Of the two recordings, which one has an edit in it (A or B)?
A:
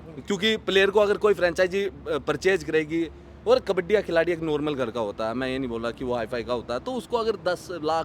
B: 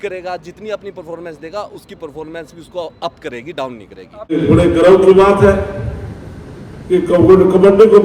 B